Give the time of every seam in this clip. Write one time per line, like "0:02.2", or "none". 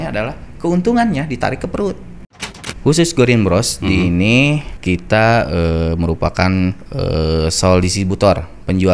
0:02.3
0:04.7
0:06.9

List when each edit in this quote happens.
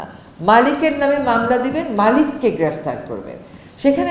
none

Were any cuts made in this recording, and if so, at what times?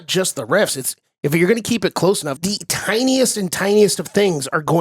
0:02.3

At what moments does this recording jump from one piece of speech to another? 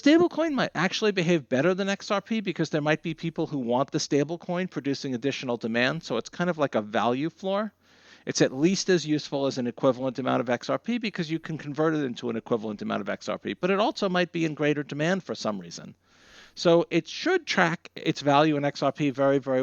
none

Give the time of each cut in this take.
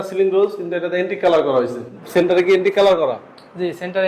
0:02.0

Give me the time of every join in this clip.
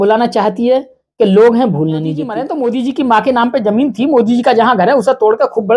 0:02.4

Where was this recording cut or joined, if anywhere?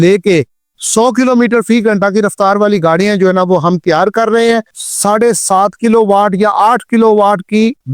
0:04.8

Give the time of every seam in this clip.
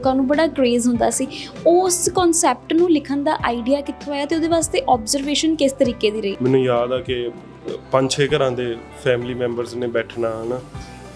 0:06.4

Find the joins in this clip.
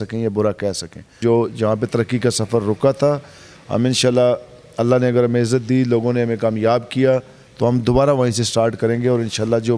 0:01.2

